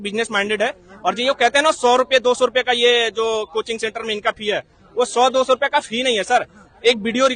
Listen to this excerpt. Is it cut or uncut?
uncut